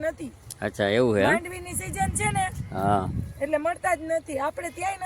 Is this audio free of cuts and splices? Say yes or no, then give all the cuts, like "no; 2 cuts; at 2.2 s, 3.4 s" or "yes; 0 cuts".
yes; 0 cuts